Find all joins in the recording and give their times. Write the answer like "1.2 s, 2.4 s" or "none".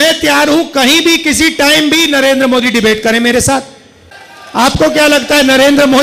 none

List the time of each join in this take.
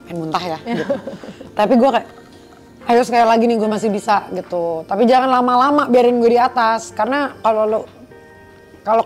none

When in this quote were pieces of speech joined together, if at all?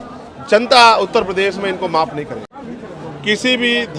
2.5 s

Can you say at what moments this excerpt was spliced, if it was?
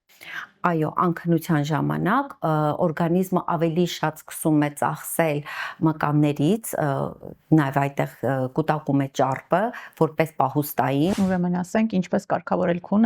11.1 s

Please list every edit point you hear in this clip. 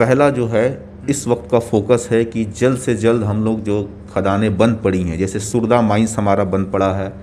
none

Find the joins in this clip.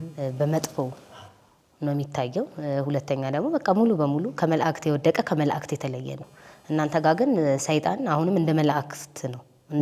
none

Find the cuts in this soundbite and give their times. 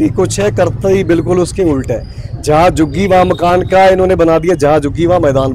none

